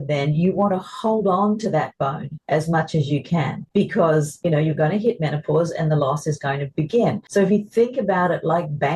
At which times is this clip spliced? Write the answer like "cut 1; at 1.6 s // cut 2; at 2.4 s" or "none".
cut 1; at 3.6 s // cut 2; at 4.3 s // cut 3; at 7.2 s